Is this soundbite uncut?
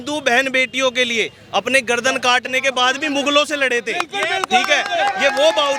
yes; 0 cuts

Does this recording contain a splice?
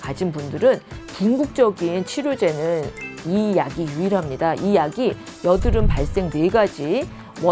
no; 0 cuts

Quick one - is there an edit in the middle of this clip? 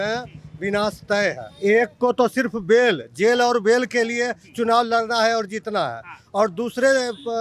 yes; 1 cut; at 1.5 s

